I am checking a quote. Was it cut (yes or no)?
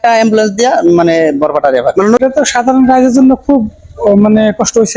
yes